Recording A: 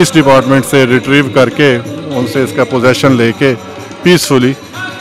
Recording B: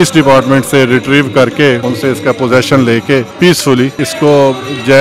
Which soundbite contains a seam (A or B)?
B